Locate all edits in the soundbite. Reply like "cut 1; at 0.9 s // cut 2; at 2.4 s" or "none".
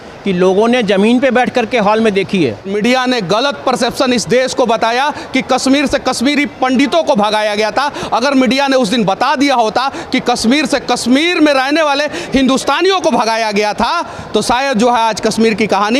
cut 1; at 2.7 s